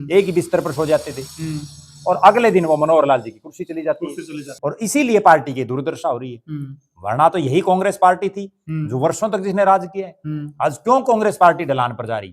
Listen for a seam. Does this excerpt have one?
yes; 1 cut; at 4.5 s

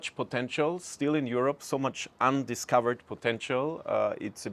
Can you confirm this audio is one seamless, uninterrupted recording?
yes; 0 cuts

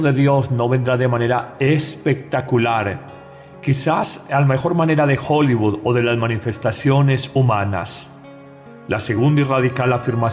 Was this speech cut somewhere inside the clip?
yes; 1 cut; at 4.9 s

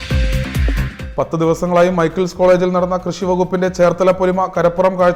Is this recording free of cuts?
yes; 0 cuts

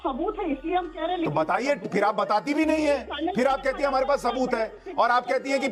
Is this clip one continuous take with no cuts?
yes; 0 cuts

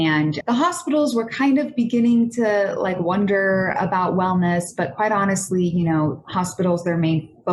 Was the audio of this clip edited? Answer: no; 0 cuts

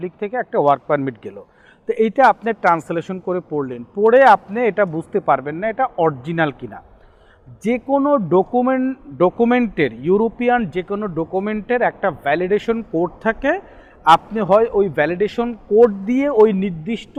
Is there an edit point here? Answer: no; 0 cuts

